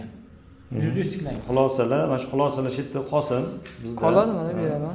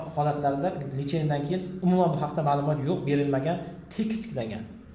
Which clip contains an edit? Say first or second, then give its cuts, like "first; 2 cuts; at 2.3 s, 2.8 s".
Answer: first; 1 cut; at 1.3 s